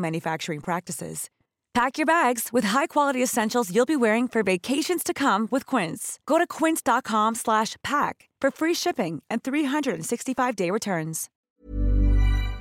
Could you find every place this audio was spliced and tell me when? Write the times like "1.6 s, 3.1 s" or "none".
11.3 s